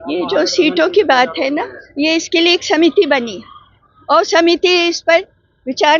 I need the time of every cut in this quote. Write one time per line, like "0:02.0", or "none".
none